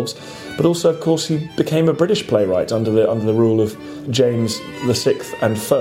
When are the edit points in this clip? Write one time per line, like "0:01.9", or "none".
0:04.0
0:04.7